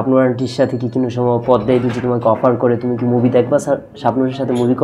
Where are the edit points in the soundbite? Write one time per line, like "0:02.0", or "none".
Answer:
none